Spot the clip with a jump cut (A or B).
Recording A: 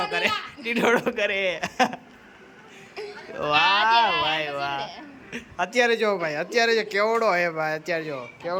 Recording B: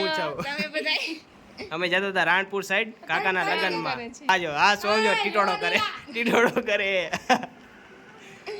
B